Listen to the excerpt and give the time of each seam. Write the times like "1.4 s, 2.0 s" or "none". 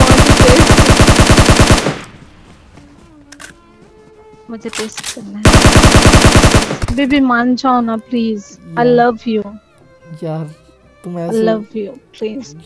6.8 s